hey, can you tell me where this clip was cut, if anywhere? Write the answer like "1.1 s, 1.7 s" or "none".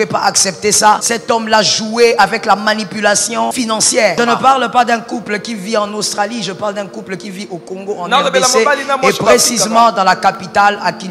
1.1 s, 3.9 s